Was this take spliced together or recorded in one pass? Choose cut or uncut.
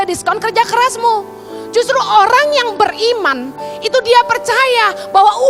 uncut